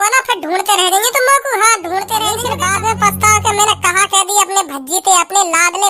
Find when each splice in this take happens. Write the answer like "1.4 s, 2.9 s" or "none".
2.4 s